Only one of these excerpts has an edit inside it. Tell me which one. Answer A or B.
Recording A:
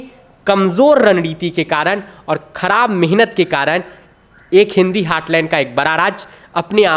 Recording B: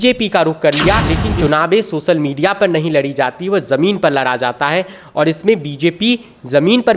B